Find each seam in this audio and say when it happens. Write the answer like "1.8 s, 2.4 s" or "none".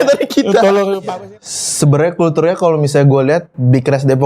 1.2 s